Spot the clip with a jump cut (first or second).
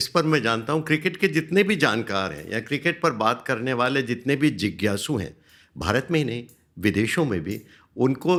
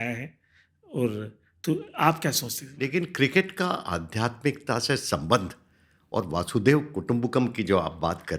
second